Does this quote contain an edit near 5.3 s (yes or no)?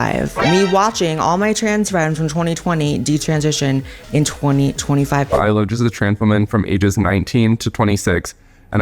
yes